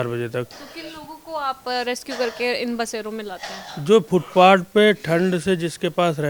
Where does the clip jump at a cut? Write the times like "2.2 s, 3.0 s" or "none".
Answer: none